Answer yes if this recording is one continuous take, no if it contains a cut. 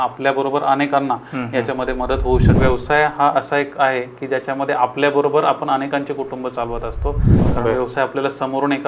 no